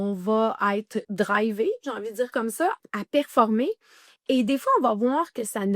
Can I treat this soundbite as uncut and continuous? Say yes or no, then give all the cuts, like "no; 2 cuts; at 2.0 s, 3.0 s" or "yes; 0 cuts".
no; 2 cuts; at 1.1 s, 2.8 s